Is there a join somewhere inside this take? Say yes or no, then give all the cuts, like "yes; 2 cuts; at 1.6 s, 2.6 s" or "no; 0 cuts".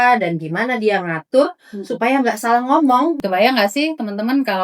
yes; 1 cut; at 3.2 s